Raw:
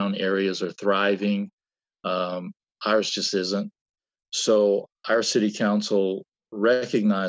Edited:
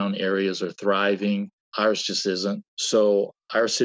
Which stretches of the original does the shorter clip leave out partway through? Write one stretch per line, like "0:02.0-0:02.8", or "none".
0:01.6-0:02.7
0:03.8-0:04.3